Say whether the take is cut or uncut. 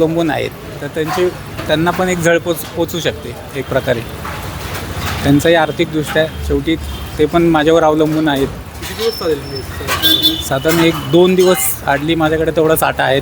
uncut